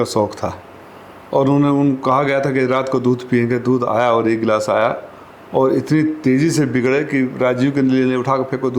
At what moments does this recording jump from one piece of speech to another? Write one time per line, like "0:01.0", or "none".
none